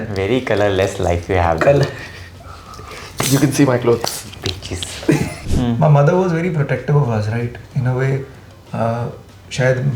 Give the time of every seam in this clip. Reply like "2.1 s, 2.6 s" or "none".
5.4 s

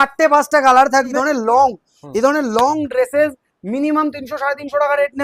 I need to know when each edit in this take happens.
1.1 s

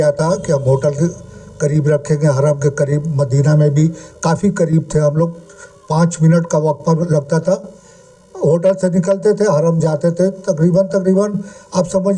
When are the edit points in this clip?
none

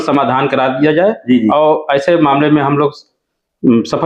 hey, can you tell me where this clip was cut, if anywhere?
none

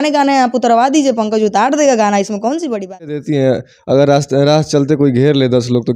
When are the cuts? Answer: 3.2 s

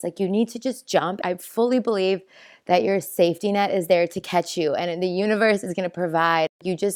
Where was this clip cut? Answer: 1.2 s

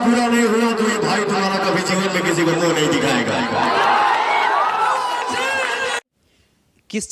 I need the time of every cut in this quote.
none

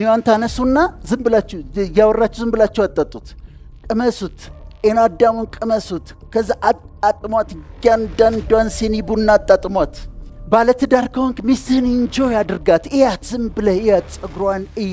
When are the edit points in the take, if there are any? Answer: none

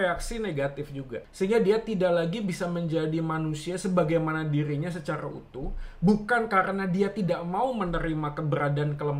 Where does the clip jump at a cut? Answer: 1.2 s

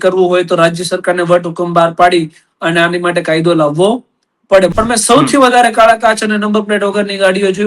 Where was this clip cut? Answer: 4.7 s

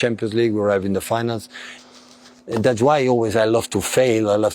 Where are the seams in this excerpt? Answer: 1.8 s

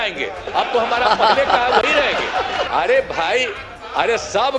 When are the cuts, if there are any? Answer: 2.7 s

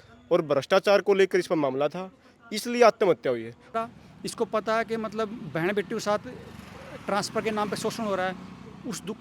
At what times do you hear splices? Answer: 3.7 s

